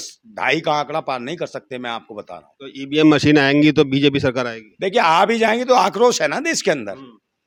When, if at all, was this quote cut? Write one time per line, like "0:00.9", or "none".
none